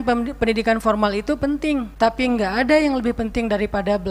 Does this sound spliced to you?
no; 0 cuts

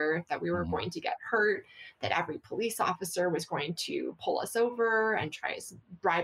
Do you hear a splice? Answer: no; 0 cuts

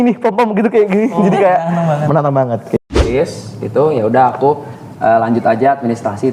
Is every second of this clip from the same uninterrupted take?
no; 1 cut; at 2.8 s

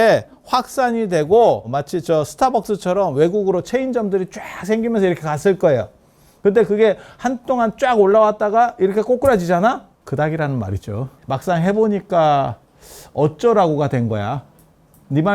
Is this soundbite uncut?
no; 3 cuts; at 1.7 s, 9.9 s, 11.1 s

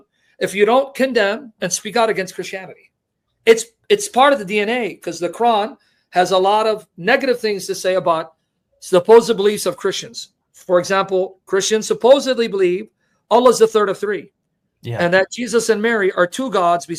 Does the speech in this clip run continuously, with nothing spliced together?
yes; 0 cuts

